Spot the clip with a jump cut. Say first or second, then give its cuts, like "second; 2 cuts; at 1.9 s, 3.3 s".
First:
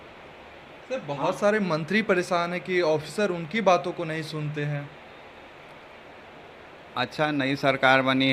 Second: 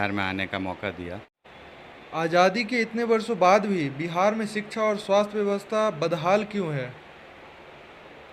second; 1 cut; at 1.3 s